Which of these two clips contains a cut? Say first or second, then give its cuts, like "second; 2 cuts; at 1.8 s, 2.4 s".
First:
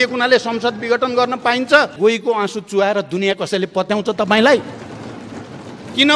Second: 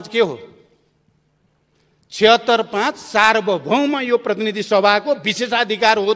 first; 1 cut; at 2.0 s